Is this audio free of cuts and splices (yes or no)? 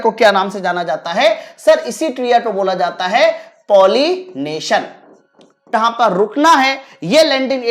no